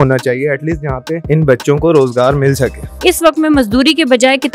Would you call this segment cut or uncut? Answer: cut